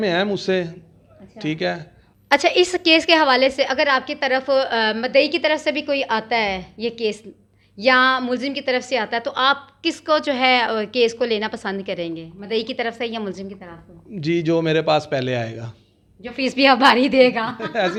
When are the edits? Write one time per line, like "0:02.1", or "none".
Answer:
none